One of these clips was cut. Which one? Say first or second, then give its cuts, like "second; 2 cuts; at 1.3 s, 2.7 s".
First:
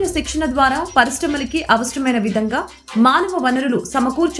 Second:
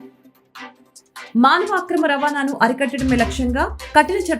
second; 1 cut; at 1.3 s